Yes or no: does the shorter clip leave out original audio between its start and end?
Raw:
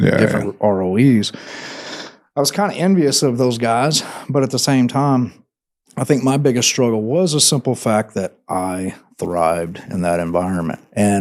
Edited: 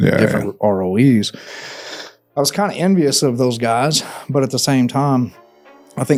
no